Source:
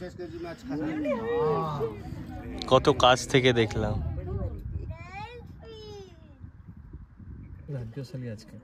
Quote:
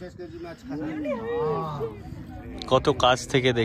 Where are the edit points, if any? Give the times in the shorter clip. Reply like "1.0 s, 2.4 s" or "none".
none